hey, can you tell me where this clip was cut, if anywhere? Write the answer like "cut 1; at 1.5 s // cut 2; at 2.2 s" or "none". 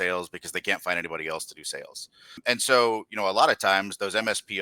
cut 1; at 2.4 s